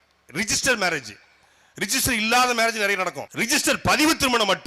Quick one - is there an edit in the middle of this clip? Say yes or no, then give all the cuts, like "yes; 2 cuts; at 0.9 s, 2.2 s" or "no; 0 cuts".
yes; 1 cut; at 3.2 s